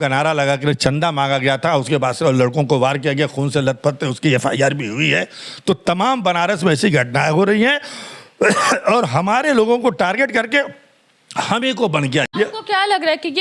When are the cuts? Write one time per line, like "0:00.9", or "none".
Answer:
0:12.3